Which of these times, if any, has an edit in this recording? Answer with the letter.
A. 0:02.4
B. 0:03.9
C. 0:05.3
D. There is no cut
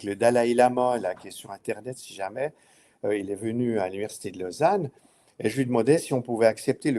D